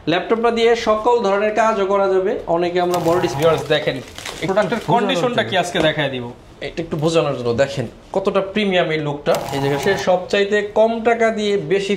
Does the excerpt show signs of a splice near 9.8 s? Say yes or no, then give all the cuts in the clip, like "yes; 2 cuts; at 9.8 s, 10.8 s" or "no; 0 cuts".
yes; 2 cuts; at 3.3 s, 9.8 s